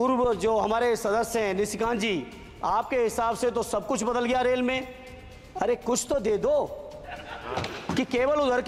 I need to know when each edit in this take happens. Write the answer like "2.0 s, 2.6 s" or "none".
none

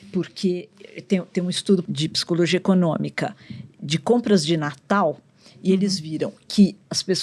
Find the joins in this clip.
1.8 s

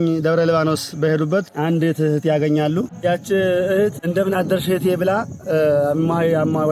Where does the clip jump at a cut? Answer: 1.5 s, 2.9 s, 4.0 s

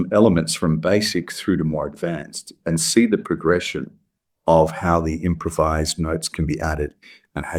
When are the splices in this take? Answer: none

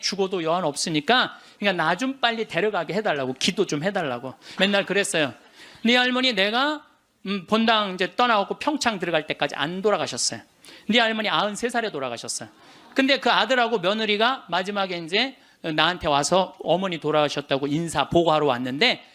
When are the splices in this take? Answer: 1.5 s, 4.4 s

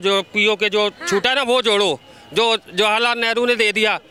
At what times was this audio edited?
none

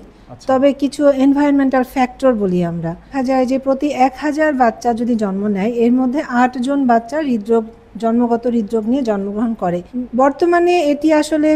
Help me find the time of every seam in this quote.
3.1 s, 9.9 s

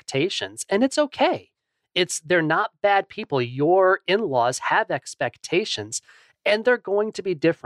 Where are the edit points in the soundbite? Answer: none

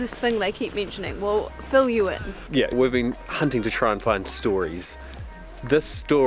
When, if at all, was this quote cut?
2.7 s

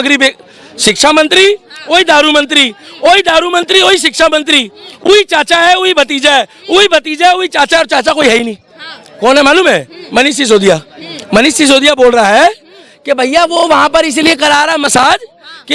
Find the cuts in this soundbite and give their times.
none

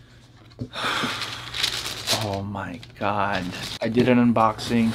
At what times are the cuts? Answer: 3.8 s

